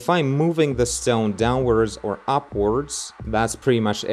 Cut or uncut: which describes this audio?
uncut